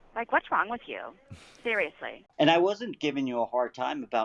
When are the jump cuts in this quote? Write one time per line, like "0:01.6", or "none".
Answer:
0:02.2